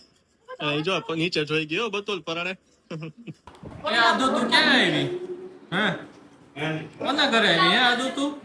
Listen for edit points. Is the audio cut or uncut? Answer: cut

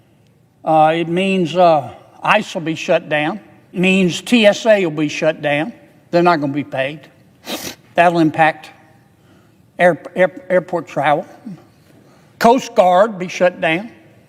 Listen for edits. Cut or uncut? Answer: cut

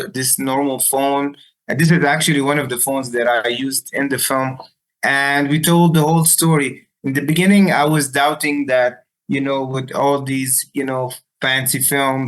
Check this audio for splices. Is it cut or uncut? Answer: uncut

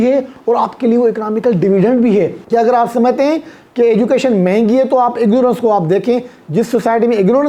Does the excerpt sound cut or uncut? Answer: cut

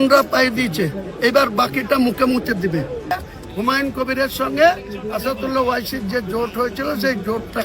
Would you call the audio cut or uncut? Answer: cut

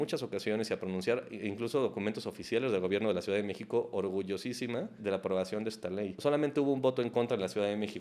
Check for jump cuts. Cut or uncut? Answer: cut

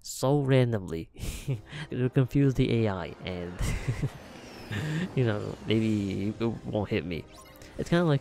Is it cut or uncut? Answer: cut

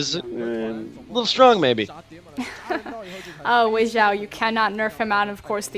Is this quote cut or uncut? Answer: cut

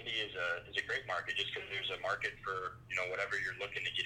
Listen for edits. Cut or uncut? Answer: uncut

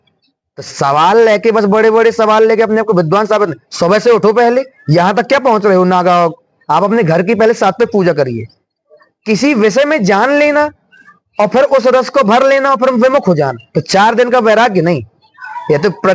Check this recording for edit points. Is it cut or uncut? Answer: uncut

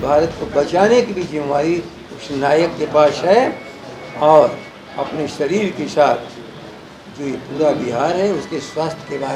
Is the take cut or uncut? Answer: uncut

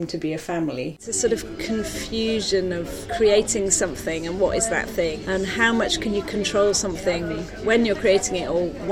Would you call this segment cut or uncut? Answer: cut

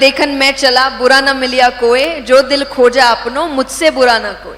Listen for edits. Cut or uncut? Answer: uncut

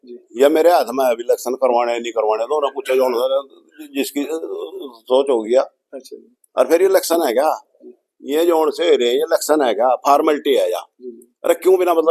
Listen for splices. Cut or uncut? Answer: uncut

